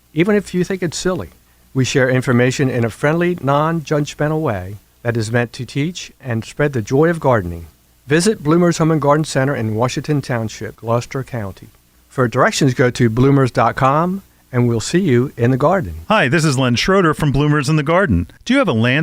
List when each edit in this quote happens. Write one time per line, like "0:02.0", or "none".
0:15.9